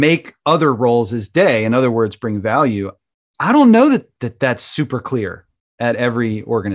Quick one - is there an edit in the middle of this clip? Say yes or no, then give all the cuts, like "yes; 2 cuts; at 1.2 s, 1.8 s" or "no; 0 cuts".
no; 0 cuts